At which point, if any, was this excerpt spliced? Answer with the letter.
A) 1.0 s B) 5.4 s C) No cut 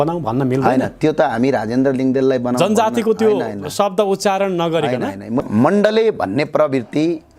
B